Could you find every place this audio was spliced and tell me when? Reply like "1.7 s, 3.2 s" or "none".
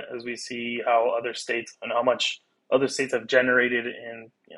none